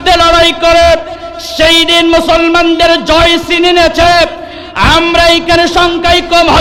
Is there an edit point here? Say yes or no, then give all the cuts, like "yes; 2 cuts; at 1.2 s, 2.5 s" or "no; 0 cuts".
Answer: no; 0 cuts